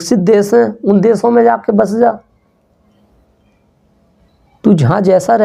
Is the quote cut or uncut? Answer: uncut